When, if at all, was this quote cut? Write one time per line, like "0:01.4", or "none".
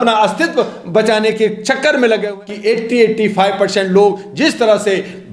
0:02.3